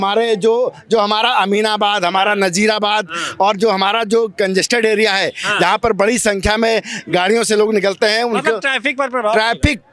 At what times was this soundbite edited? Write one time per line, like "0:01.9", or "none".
none

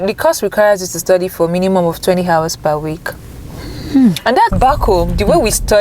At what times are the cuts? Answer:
0:04.5

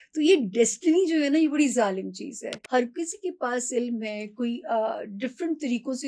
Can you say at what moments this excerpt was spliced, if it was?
0:02.5

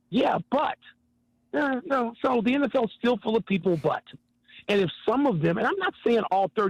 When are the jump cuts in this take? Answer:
none

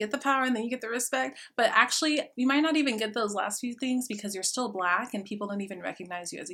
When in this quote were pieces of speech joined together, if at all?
none

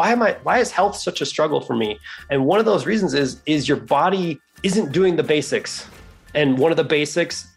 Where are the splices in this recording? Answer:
0:04.4
0:06.3

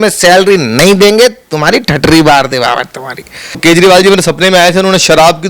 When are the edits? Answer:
0:03.6

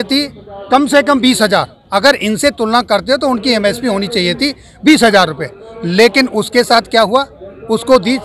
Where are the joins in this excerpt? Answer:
none

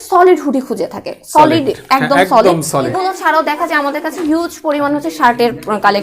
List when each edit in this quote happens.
0:02.9

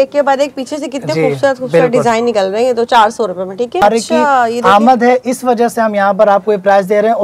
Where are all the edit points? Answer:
0:03.8

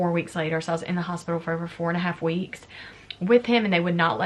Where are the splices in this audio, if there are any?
none

